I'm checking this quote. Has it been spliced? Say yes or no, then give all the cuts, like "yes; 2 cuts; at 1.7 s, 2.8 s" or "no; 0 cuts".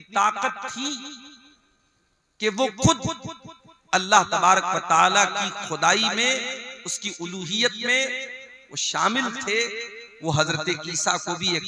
no; 0 cuts